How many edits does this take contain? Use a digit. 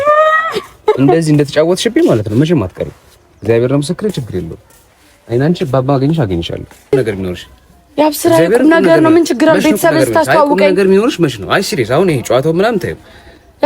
1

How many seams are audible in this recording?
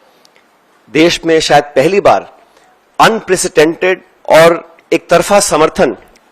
2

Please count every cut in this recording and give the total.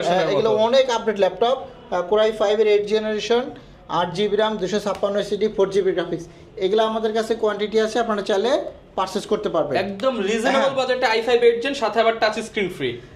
0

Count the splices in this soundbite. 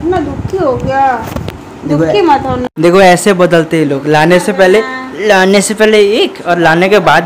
0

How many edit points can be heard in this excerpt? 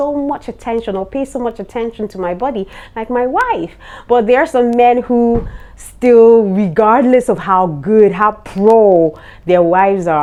0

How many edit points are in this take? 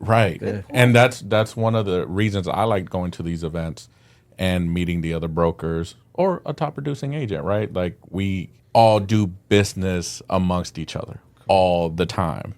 1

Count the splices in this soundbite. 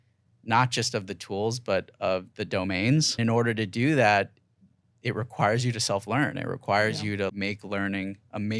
2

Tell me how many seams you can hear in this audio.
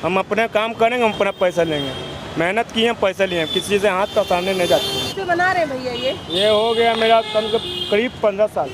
1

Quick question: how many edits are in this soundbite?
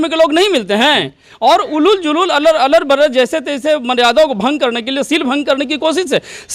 1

